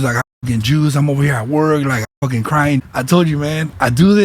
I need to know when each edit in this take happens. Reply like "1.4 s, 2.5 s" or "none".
2.9 s

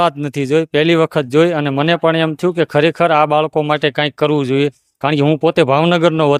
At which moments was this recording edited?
none

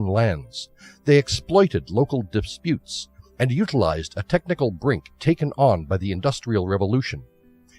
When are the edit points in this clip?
2.7 s

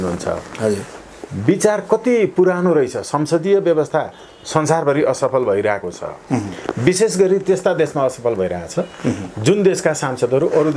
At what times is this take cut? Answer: none

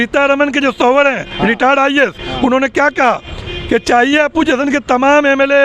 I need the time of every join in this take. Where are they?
none

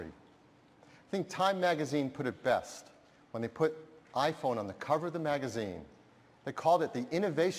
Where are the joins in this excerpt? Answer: 3.5 s

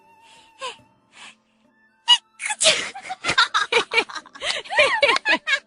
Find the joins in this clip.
none

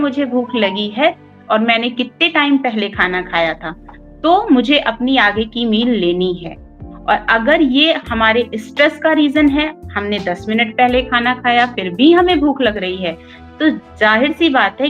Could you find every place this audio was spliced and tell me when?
none

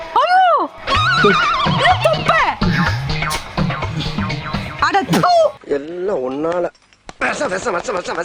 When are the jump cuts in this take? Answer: none

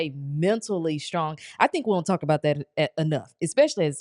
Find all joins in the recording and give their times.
none

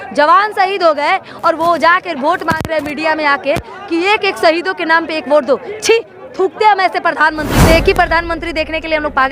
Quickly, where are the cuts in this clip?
7.5 s

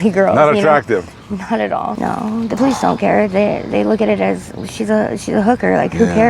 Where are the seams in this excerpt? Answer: 1.9 s

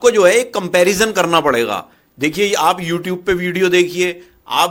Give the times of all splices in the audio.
none

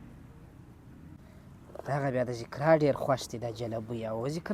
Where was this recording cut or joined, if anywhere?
1.2 s

